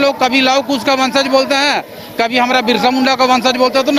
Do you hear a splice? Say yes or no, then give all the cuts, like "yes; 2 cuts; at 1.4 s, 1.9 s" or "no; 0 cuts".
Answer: no; 0 cuts